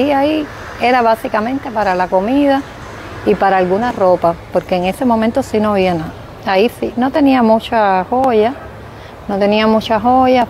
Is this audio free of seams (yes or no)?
yes